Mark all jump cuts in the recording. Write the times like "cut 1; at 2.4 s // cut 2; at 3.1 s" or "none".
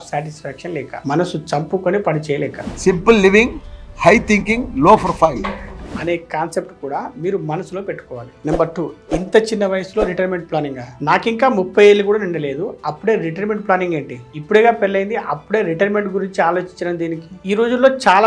none